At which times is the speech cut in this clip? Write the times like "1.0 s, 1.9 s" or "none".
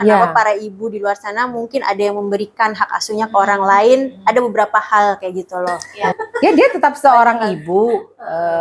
6.0 s